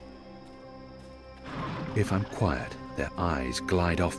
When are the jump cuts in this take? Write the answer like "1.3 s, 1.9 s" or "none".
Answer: 1.9 s